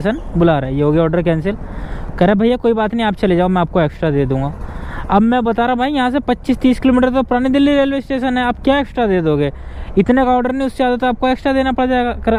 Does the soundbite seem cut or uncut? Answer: uncut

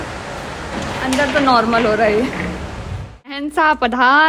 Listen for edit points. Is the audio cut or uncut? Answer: cut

